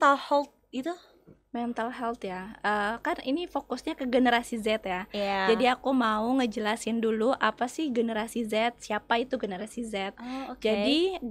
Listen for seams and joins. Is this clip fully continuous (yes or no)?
yes